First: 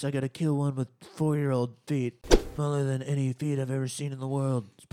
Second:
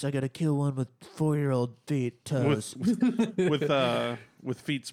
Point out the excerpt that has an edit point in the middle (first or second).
first